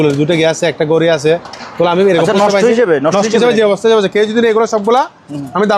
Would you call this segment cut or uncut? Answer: uncut